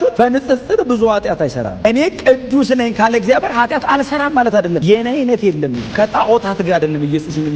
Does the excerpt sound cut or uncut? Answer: cut